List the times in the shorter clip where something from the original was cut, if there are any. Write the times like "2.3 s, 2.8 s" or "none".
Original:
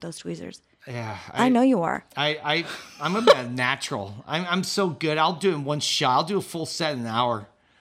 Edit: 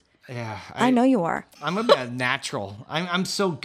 1.5 s